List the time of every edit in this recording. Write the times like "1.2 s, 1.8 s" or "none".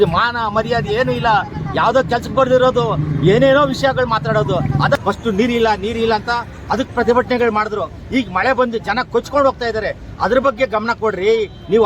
5.0 s